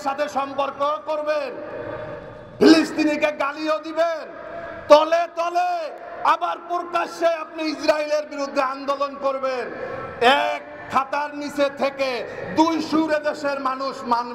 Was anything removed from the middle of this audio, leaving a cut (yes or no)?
no